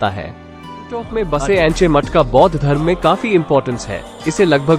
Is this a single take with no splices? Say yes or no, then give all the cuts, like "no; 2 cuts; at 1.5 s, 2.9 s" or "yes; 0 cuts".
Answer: no; 1 cut; at 1.0 s